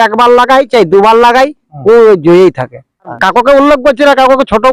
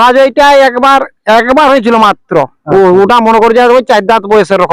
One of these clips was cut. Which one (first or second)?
first